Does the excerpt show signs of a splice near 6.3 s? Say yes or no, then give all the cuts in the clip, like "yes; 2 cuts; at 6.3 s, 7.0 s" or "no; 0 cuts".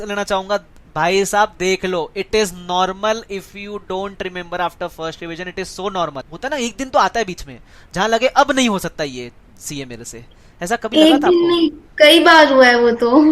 yes; 1 cut; at 6.3 s